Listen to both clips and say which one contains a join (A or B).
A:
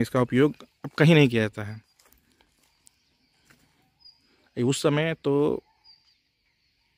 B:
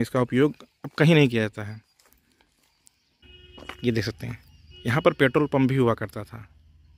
B